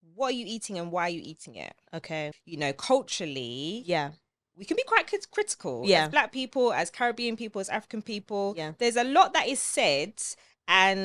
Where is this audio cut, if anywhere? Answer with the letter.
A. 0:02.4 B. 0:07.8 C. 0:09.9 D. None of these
A